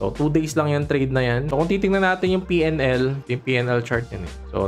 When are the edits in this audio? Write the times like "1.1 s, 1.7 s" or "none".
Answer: 1.4 s

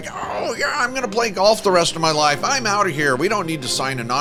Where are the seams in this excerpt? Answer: none

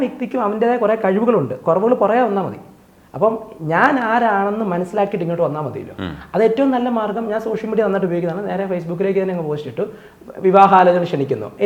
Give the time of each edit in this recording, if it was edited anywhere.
none

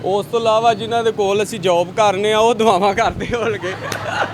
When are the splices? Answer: none

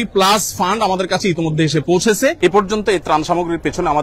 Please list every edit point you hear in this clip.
2.4 s

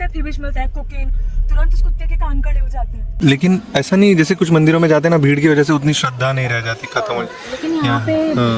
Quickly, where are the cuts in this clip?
3.2 s

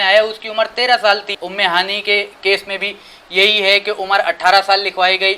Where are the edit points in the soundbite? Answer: 1.4 s

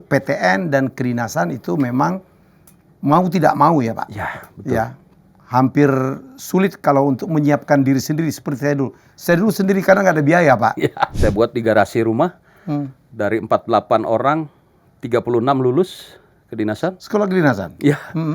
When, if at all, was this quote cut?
11.1 s

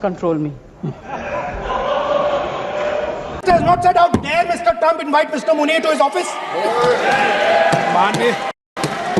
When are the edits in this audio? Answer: none

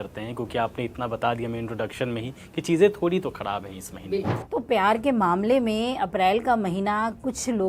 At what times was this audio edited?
4.4 s

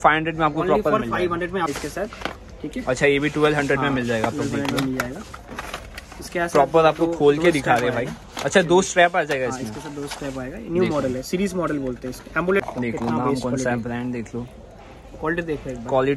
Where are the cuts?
1.7 s, 12.6 s

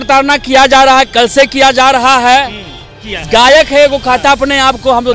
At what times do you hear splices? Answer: 3.1 s

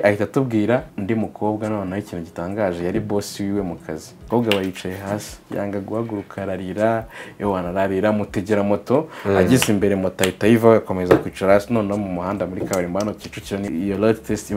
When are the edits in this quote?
0.9 s, 4.1 s, 13.7 s

